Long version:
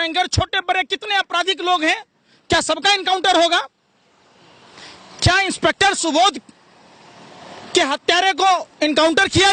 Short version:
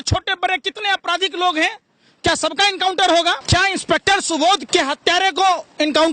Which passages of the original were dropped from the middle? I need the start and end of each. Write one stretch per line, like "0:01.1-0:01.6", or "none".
0:03.7-0:05.2
0:06.4-0:07.7